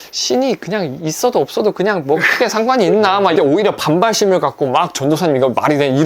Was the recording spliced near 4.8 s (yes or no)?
no